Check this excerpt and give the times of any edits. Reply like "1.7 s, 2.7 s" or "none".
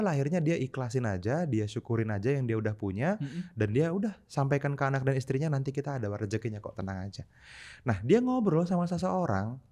none

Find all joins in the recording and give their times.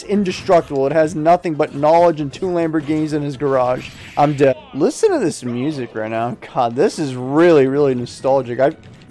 none

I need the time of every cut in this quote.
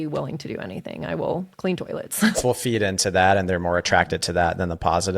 2.4 s

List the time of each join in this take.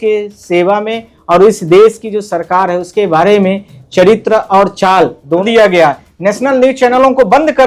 5.5 s

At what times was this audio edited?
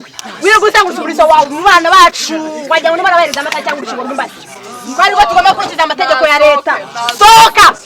none

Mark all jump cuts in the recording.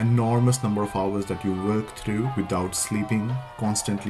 none

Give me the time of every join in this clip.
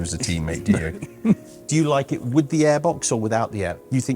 1.5 s

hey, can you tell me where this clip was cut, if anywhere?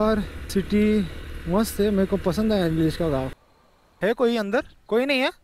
3.3 s

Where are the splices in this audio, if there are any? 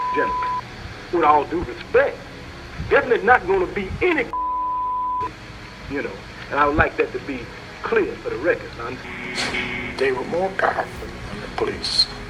none

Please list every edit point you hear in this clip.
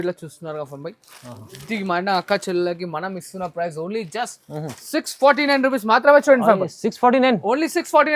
none

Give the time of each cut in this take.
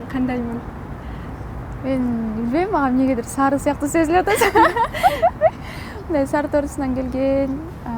none

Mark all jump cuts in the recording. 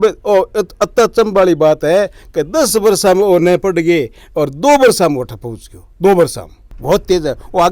6.6 s

